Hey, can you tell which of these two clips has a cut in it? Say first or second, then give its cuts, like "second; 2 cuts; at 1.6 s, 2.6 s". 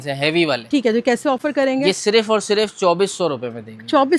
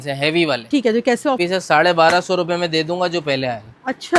second; 1 cut; at 1.4 s